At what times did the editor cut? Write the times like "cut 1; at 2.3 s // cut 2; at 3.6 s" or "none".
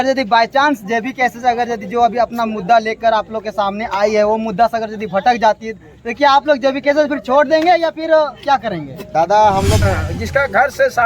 cut 1; at 9.8 s